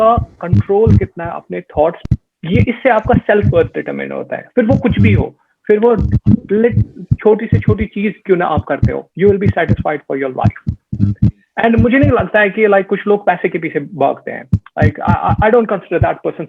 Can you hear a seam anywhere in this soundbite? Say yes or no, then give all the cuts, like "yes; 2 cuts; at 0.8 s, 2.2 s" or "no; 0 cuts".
yes; 1 cut; at 2.0 s